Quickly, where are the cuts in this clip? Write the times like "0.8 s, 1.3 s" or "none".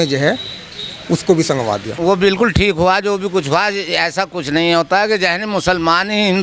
1.9 s